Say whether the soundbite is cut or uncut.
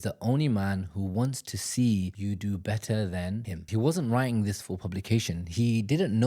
cut